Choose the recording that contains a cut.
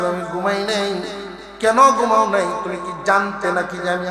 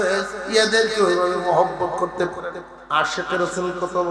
second; 1 cut; at 2.7 s

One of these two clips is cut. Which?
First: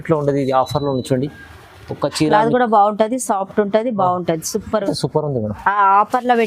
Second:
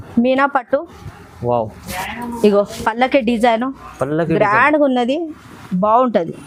first; 1 cut; at 4.9 s

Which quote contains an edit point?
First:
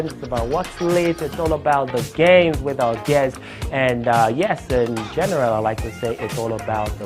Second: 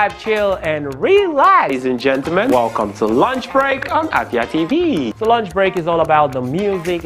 first; 1 cut; at 4.0 s

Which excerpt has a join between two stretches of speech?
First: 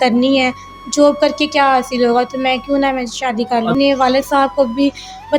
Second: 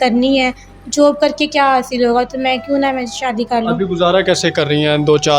first; 1 cut; at 3.7 s

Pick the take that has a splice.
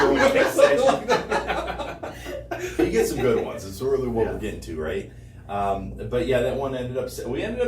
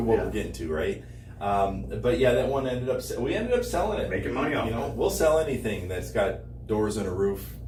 first; 1 cut; at 2.8 s

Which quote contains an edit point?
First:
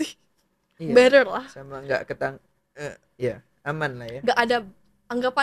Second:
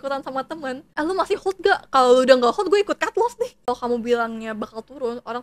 second; 2 cuts; at 0.8 s, 3.6 s

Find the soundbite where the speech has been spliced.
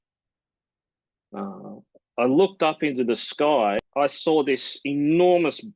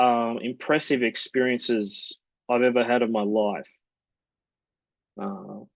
first; 1 cut; at 3.8 s

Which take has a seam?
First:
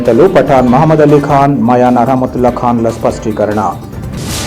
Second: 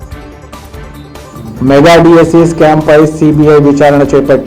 second; 1 cut; at 1.0 s

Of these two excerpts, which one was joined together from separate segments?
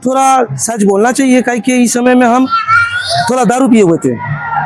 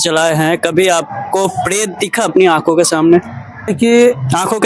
second; 1 cut; at 3.6 s

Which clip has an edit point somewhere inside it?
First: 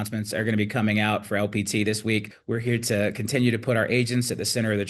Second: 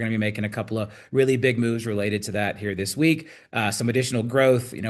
first; 1 cut; at 2.4 s

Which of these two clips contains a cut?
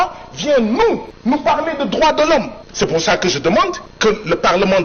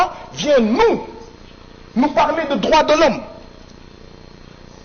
first; 3 cuts; at 1.1 s, 2.6 s, 3.9 s

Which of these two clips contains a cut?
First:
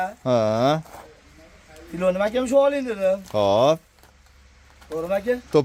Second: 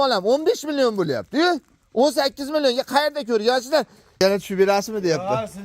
second; 1 cut; at 4.2 s

